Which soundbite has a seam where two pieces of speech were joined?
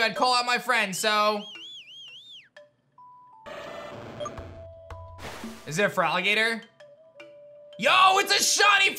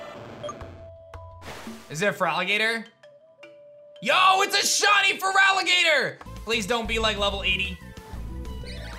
second; 1 cut; at 6.3 s

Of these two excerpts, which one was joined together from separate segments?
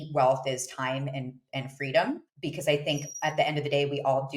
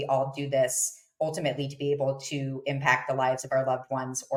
first; 1 cut; at 2.3 s

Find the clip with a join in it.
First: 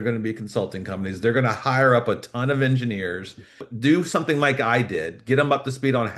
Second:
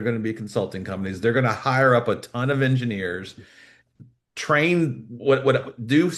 first; 1 cut; at 3.7 s

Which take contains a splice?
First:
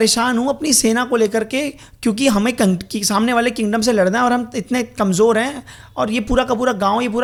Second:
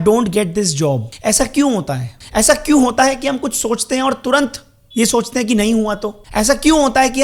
second; 3 cuts; at 1.1 s, 2.1 s, 6.2 s

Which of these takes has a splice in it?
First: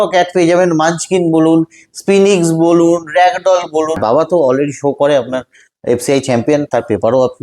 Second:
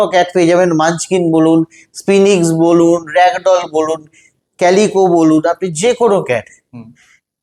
first; 1 cut; at 4.0 s

